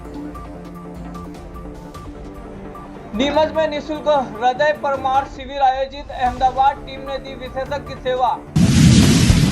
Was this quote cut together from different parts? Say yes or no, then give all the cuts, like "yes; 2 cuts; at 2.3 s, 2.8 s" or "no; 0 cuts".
yes; 1 cut; at 8.4 s